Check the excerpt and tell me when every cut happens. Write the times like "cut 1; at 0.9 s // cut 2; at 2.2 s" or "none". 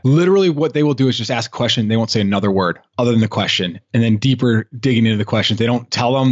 none

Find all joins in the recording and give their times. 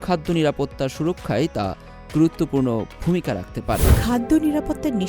cut 1; at 3.9 s

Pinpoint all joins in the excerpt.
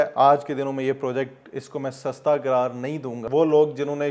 cut 1; at 3.2 s

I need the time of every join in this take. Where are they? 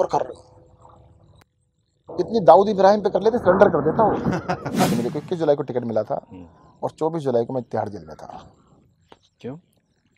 cut 1; at 4.9 s

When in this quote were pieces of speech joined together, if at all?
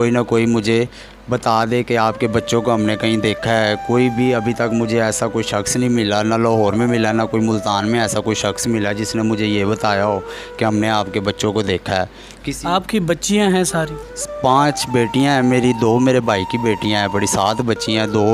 none

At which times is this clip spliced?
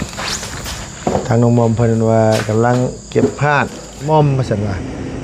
cut 1; at 4.1 s

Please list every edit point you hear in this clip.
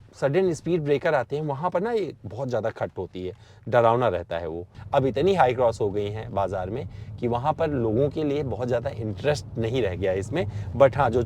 cut 1; at 4.8 s

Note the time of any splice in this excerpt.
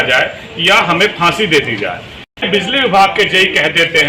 cut 1; at 2.4 s

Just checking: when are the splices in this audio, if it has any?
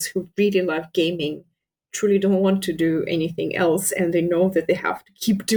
none

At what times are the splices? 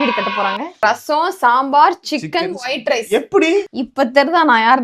cut 1; at 0.8 s // cut 2; at 3.8 s

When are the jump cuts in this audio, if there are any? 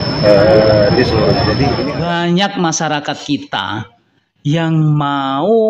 cut 1; at 1.9 s

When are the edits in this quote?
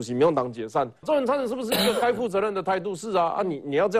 cut 1; at 1.0 s

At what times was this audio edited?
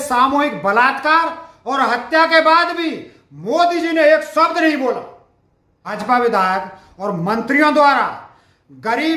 cut 1; at 6.0 s

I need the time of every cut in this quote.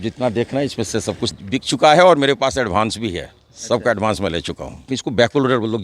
cut 1; at 1.2 s // cut 2; at 4.9 s

